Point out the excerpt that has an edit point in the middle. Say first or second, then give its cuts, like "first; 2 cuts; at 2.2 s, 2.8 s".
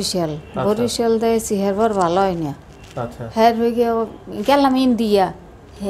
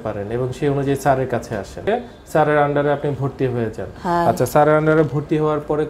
second; 1 cut; at 1.9 s